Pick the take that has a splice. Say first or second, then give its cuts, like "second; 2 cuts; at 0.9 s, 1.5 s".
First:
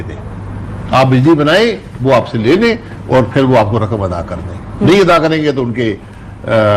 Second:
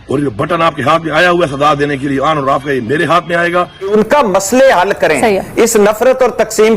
second; 1 cut; at 3.9 s